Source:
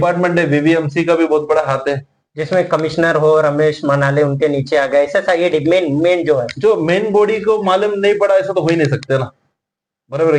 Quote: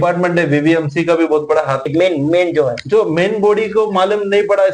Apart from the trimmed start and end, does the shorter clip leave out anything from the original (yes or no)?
yes